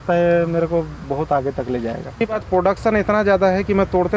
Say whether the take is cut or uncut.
cut